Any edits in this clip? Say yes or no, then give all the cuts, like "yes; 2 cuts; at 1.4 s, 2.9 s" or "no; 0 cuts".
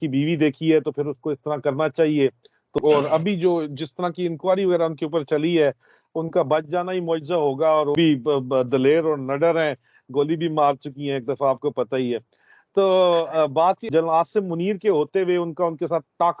yes; 3 cuts; at 2.7 s, 7.9 s, 13.8 s